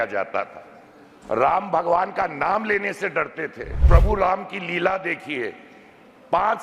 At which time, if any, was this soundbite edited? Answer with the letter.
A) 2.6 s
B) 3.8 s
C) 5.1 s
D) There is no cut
B